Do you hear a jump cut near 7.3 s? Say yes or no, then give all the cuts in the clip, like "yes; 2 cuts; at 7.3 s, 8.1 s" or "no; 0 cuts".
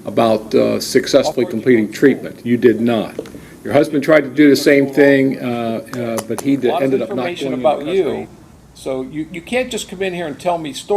yes; 1 cut; at 7.3 s